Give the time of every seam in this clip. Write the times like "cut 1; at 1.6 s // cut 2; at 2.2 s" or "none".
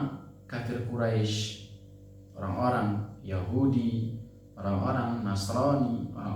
none